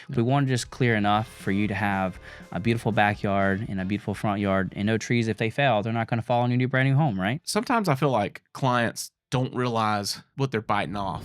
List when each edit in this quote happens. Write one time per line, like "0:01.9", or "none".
0:07.4
0:10.2